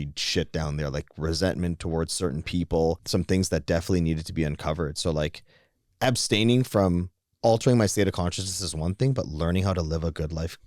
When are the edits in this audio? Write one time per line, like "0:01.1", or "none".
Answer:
0:03.0

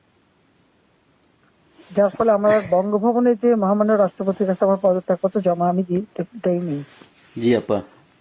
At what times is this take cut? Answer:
none

